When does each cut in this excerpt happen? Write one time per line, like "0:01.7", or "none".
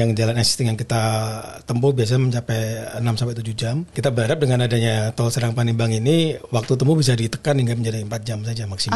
0:03.9